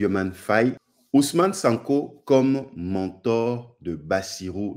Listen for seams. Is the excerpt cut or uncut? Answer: cut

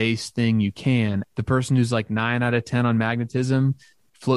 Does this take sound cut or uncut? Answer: cut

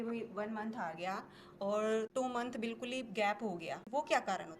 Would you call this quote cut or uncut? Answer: cut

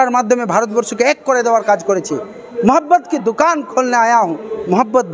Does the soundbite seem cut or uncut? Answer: uncut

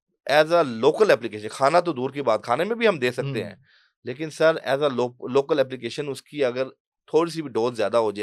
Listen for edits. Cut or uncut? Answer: uncut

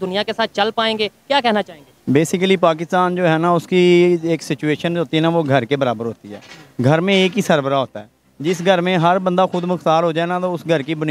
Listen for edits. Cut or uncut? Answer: uncut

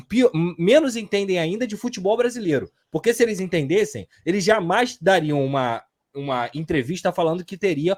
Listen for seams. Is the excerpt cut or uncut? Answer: uncut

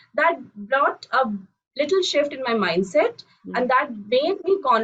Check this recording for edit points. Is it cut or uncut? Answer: uncut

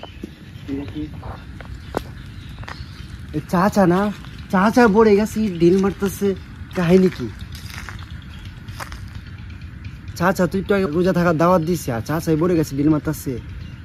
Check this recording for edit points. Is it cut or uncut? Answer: cut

